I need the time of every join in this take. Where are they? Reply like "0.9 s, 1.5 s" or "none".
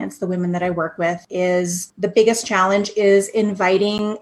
1.6 s